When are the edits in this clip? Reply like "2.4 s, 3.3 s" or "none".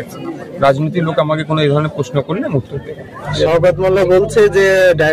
3.3 s